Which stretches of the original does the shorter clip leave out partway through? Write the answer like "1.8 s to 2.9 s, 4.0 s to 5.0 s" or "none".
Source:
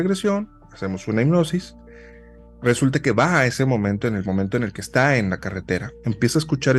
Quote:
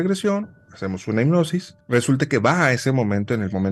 1.7 s to 2.5 s